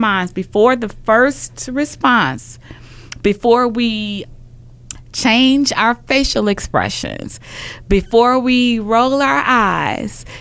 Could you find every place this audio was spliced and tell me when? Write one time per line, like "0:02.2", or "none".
0:04.2